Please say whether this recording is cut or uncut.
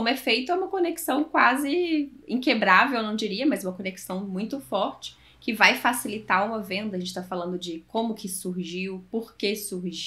uncut